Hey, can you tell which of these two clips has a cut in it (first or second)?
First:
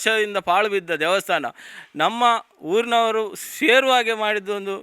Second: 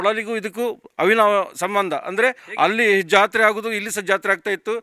second